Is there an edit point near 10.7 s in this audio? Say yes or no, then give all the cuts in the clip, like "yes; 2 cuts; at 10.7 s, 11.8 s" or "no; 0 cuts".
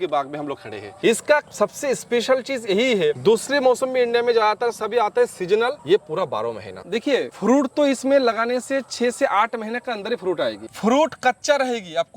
yes; 3 cuts; at 0.9 s, 6.7 s, 10.7 s